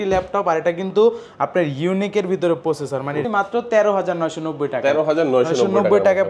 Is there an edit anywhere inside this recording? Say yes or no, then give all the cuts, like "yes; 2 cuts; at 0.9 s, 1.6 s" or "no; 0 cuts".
yes; 1 cut; at 3.2 s